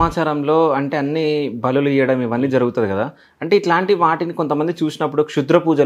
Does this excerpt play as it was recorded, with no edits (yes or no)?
yes